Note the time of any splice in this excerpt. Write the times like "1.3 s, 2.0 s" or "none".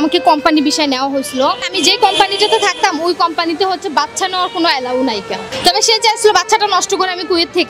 1.7 s, 5.4 s